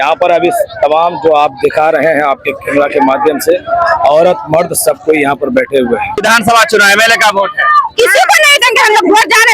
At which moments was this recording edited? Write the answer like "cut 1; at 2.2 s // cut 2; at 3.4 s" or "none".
cut 1; at 6.2 s